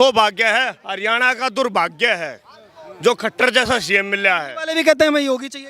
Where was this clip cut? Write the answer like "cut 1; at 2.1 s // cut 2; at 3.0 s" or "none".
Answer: none